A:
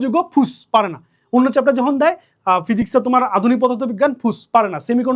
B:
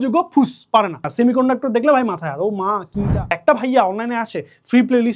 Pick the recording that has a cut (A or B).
B